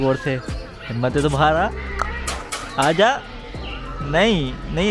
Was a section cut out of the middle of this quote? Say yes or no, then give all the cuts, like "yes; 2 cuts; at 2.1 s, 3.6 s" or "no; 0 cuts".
no; 0 cuts